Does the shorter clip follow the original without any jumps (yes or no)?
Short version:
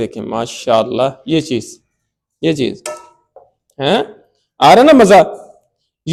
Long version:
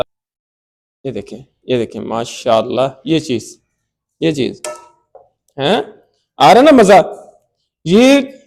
yes